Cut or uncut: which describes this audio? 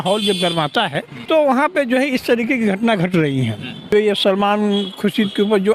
cut